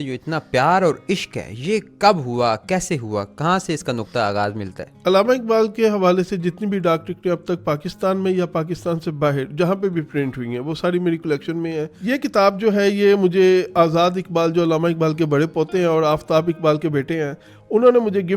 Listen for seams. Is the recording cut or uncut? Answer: cut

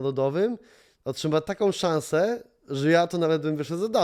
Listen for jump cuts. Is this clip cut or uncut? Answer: uncut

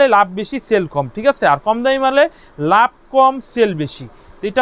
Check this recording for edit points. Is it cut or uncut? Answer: uncut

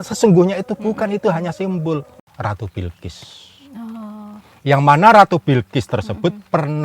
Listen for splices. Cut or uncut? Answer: cut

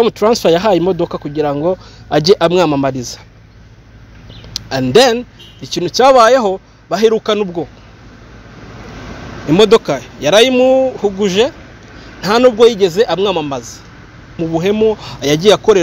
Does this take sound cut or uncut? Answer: cut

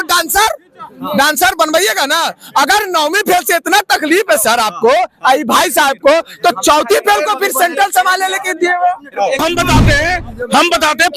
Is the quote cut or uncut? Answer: cut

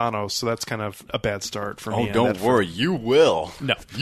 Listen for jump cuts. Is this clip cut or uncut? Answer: cut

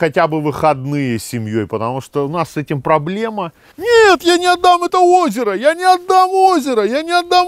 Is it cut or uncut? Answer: cut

